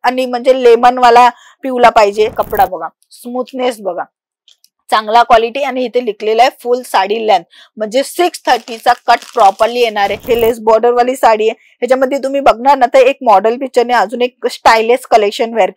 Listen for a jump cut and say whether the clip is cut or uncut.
cut